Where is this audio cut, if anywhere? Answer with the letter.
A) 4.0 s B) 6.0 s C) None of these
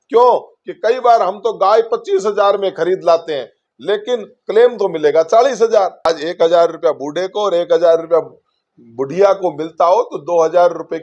B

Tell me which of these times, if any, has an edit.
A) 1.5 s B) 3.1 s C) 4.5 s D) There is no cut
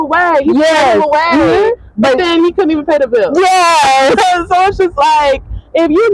D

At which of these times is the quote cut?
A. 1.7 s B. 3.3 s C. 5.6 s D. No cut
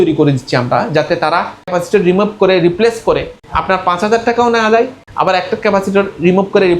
A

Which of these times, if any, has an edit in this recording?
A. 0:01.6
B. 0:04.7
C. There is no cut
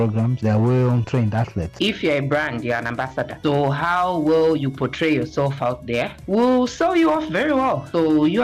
A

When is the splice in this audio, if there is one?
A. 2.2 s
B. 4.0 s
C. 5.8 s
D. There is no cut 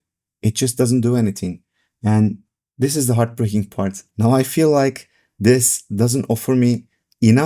B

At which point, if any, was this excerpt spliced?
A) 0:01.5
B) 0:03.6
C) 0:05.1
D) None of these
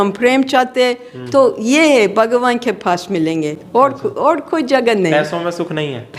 D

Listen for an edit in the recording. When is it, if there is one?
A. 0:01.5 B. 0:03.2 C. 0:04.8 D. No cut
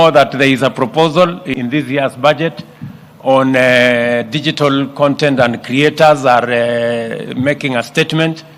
A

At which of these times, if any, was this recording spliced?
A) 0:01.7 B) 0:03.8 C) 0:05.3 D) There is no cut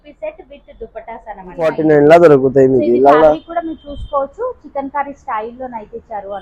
A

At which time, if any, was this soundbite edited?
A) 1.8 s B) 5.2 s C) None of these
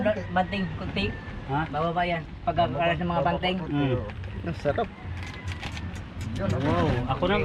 C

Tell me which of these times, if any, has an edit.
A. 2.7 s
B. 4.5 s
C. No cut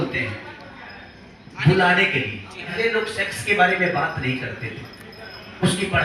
A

